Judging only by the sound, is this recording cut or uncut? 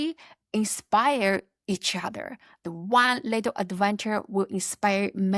uncut